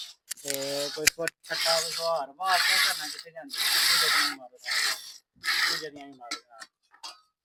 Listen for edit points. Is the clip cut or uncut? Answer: uncut